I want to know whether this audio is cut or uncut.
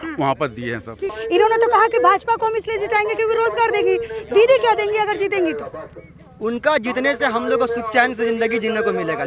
cut